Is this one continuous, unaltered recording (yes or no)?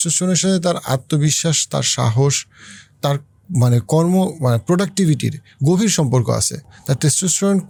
yes